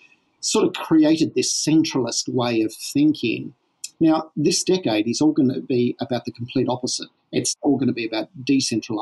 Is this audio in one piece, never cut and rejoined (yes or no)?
no